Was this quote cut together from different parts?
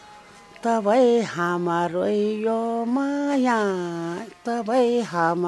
no; 0 cuts

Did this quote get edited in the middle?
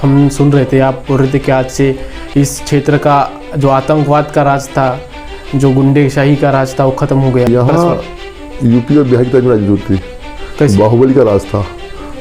yes; 1 cut; at 7.5 s

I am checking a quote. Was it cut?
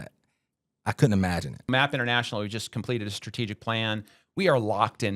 yes; 1 cut; at 1.7 s

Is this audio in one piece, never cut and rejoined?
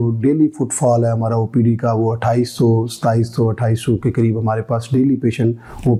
yes; 0 cuts

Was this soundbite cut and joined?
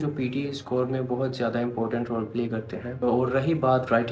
yes; 1 cut; at 3.0 s

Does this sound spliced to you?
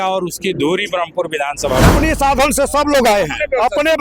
yes; 1 cut; at 1.9 s

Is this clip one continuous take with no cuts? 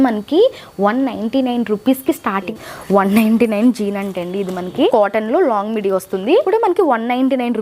no; 3 cuts; at 2.5 s, 4.9 s, 6.5 s

